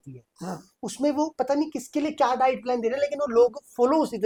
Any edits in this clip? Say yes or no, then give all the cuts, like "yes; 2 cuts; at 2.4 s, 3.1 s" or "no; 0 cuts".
no; 0 cuts